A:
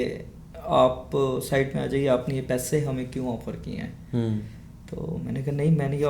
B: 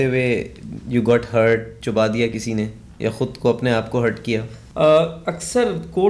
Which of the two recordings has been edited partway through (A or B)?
B